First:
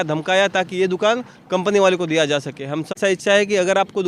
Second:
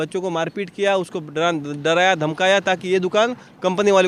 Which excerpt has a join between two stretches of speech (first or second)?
first